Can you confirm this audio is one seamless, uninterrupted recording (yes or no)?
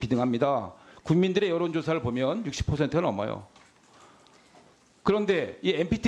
yes